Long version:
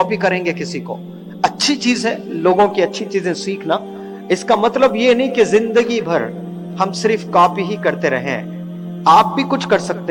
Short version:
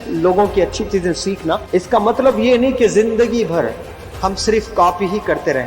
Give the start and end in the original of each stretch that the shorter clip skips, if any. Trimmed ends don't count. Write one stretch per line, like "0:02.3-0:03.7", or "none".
0:03.8-0:04.2